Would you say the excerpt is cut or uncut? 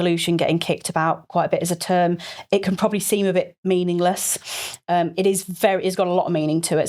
uncut